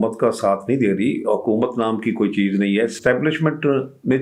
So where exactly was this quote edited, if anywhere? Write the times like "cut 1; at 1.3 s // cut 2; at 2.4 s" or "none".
none